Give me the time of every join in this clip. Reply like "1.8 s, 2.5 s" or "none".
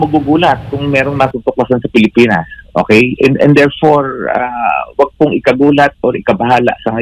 none